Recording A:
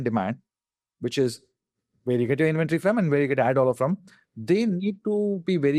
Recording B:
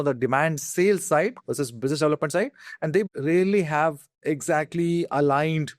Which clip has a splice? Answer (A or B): B